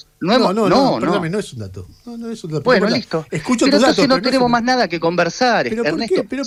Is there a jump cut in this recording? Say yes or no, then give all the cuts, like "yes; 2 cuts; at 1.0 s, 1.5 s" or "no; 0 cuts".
no; 0 cuts